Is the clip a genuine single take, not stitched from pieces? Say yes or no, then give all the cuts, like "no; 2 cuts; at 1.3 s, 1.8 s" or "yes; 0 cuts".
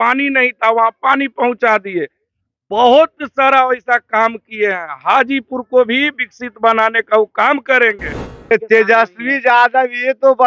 no; 1 cut; at 8.5 s